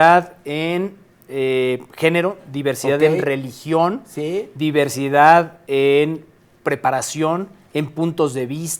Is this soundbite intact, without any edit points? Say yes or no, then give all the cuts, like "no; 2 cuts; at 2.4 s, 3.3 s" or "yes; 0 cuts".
yes; 0 cuts